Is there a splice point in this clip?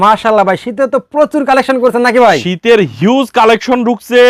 no; 0 cuts

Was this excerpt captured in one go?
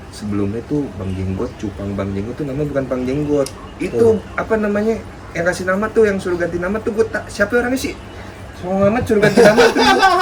yes; 0 cuts

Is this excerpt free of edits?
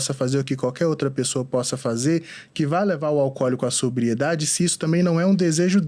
yes; 0 cuts

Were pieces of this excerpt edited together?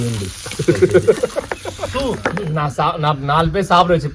yes; 1 cut; at 2.3 s

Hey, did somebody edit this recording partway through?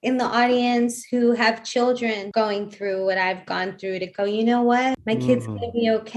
yes; 2 cuts; at 2.2 s, 5.0 s

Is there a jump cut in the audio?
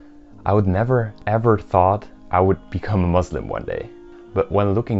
no; 0 cuts

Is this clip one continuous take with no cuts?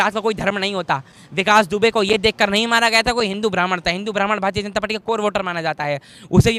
yes; 0 cuts

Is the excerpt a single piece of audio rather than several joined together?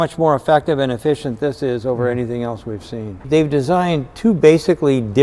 no; 1 cut; at 3.2 s

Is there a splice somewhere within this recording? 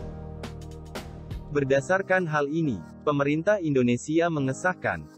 yes; 1 cut; at 1.5 s

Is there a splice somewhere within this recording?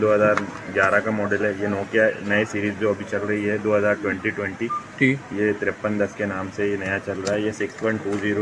no; 0 cuts

